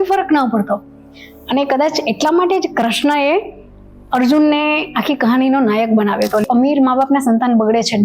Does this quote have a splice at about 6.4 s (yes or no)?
yes